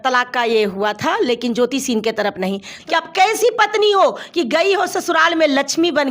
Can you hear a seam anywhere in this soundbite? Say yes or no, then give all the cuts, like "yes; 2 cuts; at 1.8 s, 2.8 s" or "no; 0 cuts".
yes; 1 cut; at 2.8 s